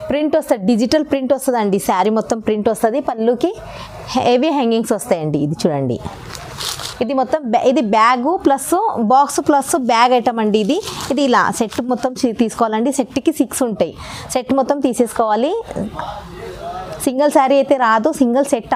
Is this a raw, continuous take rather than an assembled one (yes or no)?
yes